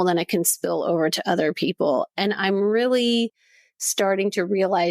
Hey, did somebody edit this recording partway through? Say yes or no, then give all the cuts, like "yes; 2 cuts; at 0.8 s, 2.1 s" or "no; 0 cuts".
no; 0 cuts